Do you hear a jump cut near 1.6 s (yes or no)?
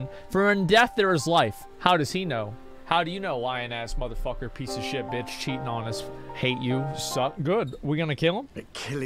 yes